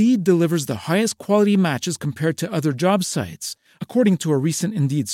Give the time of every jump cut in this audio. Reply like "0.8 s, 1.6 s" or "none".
none